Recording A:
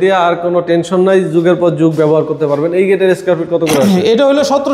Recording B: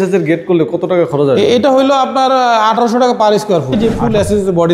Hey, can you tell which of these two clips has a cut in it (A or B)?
B